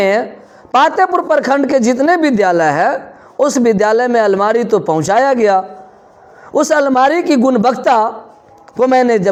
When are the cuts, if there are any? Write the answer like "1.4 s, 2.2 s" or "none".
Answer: none